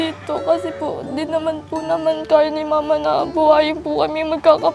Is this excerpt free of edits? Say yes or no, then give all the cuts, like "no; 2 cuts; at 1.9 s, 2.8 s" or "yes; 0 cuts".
yes; 0 cuts